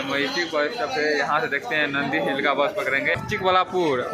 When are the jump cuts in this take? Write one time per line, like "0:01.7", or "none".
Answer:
0:03.2